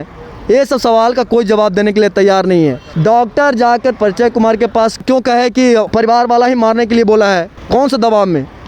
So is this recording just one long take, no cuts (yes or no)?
no